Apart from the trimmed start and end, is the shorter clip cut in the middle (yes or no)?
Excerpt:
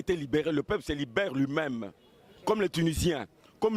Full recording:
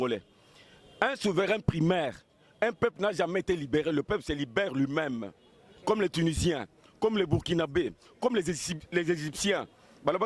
no